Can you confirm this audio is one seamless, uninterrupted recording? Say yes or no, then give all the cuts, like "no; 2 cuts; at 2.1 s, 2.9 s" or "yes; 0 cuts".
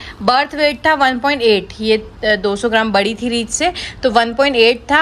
yes; 0 cuts